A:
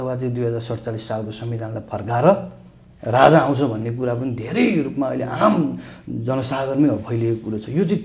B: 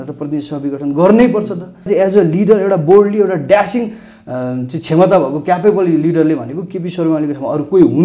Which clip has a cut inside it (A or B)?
B